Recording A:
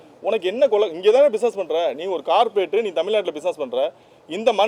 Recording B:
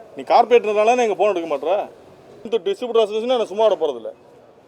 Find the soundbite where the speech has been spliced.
B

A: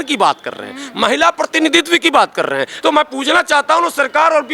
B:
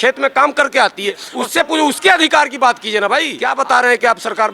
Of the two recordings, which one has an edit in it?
B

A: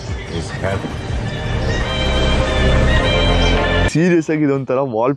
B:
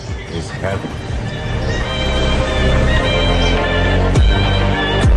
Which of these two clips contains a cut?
A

